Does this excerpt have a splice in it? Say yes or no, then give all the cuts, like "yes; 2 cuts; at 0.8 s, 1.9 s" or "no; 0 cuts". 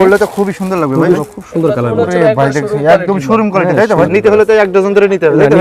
yes; 2 cuts; at 1.2 s, 4.1 s